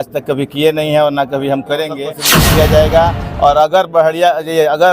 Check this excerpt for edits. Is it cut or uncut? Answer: cut